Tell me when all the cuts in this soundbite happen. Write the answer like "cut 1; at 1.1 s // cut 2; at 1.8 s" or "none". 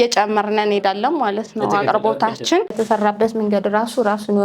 cut 1; at 2.7 s